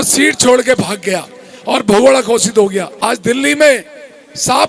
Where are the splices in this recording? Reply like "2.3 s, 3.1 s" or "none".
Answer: 2.9 s